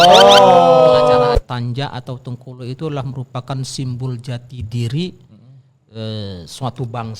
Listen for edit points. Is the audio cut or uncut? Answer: cut